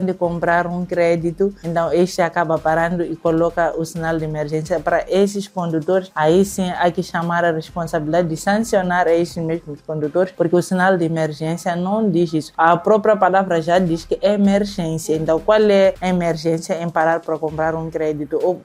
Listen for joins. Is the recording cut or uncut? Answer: uncut